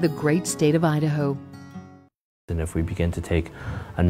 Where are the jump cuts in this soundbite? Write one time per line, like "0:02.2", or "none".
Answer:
0:02.5